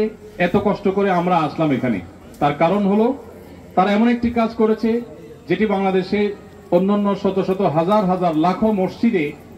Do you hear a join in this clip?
no; 0 cuts

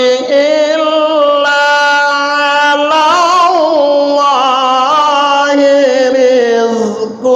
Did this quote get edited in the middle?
no; 0 cuts

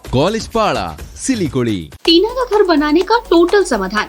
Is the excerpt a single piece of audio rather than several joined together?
no; 1 cut; at 2.0 s

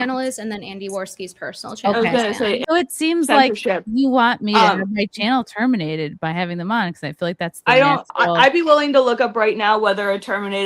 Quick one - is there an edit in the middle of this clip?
yes; 1 cut; at 2.6 s

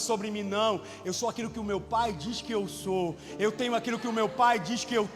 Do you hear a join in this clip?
no; 0 cuts

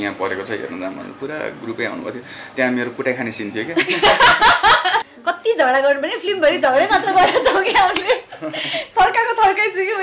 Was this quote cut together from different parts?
yes; 1 cut; at 5.1 s

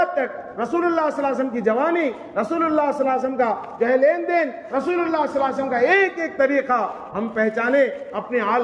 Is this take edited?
no; 0 cuts

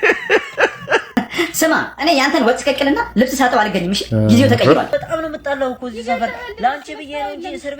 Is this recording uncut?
no; 2 cuts; at 1.1 s, 4.9 s

